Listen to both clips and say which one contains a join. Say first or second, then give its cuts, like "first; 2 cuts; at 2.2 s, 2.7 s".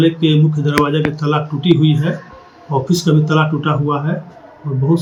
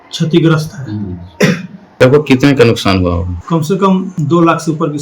second; 3 cuts; at 2.0 s, 3.3 s, 4.1 s